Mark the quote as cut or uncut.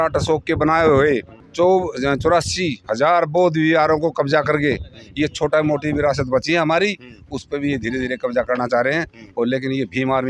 uncut